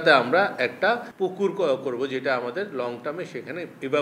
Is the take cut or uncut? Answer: cut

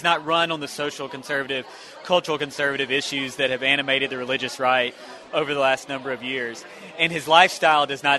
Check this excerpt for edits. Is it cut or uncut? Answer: uncut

